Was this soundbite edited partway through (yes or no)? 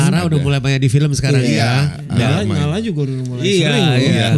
no